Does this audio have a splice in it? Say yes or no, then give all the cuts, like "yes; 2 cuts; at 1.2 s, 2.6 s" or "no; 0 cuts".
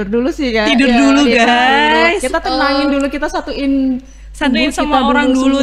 no; 0 cuts